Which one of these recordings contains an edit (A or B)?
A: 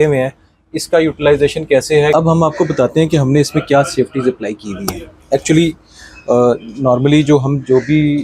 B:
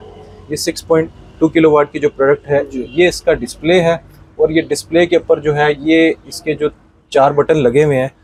A